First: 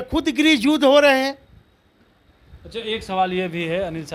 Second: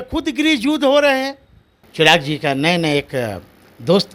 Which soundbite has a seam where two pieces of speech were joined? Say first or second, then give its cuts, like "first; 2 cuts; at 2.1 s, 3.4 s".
second; 1 cut; at 1.8 s